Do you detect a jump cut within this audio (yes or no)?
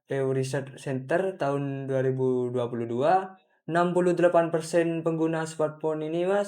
no